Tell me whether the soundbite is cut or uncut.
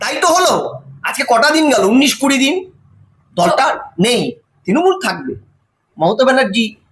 cut